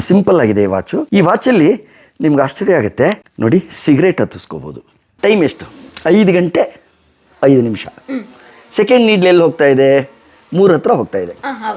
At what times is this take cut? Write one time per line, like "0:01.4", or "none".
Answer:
0:01.0
0:03.3
0:05.0